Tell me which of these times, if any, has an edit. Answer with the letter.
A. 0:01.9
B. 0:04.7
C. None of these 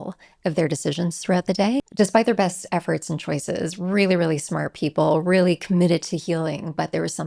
A